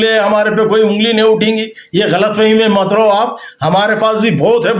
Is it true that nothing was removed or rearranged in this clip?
yes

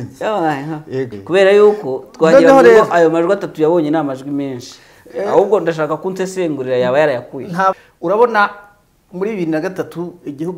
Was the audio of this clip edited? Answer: yes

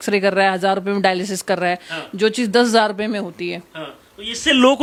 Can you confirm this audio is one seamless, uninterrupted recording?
yes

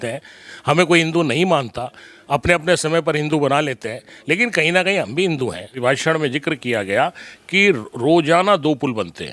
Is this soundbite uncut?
no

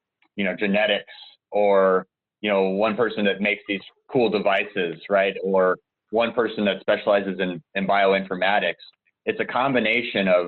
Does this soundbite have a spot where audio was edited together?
no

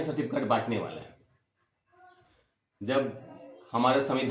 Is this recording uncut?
yes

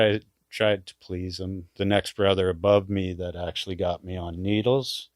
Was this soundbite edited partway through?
yes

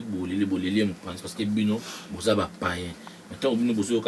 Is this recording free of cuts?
yes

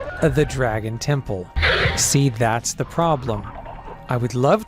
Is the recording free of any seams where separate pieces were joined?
no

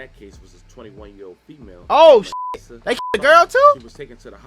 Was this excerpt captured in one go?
yes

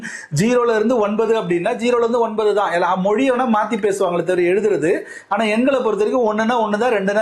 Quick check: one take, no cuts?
yes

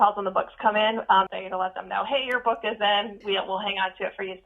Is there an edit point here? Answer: yes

